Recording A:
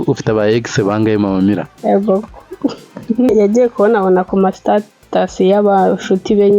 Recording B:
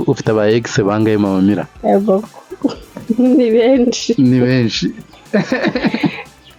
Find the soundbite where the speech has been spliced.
A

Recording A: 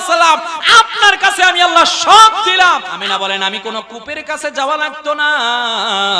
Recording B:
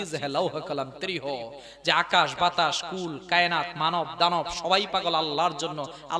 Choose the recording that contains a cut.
A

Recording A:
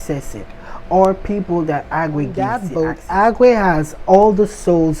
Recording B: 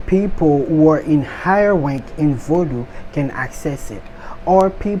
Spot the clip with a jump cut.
A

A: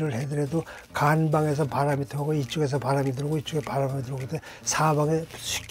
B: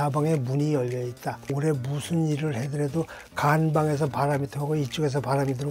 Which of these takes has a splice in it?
B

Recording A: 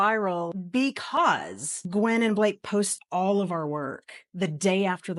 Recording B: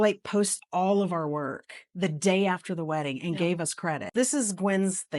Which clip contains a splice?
B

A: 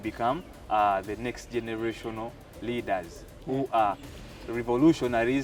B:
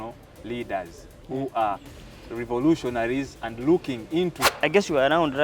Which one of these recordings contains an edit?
B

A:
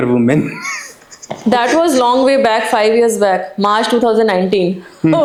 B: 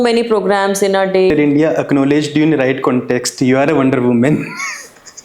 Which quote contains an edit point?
B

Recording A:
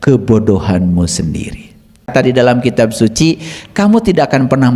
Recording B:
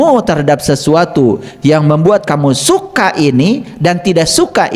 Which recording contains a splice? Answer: A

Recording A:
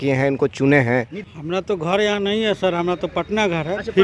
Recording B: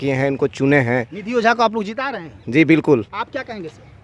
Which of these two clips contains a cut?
A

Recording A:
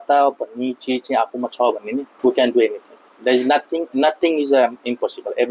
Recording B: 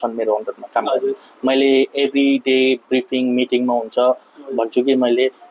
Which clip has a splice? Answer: A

